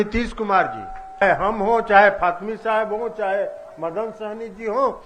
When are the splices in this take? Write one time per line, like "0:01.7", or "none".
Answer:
0:01.2